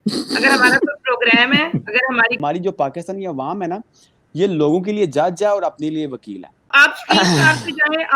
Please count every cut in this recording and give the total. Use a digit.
2